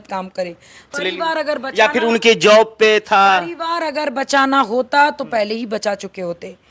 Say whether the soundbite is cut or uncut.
cut